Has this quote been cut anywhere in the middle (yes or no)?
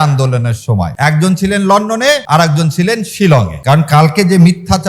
yes